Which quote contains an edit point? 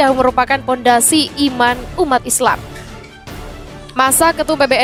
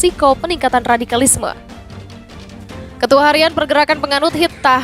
second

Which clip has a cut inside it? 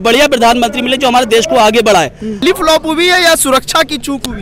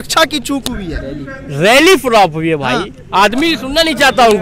first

